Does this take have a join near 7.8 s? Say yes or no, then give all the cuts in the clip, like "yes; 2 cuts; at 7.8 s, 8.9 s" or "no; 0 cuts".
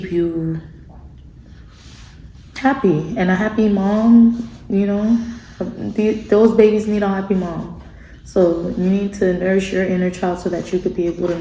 no; 0 cuts